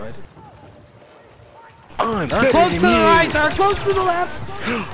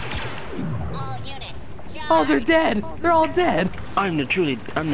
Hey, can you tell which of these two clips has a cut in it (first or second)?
second